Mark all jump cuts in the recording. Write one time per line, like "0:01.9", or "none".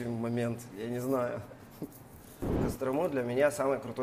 0:02.6